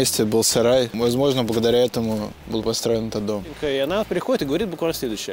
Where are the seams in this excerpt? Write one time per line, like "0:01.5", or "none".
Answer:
0:00.9
0:02.4
0:03.5